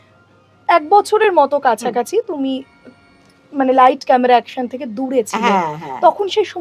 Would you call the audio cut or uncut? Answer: uncut